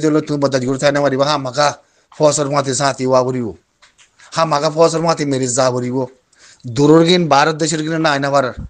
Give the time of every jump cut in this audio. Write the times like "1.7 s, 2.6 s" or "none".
none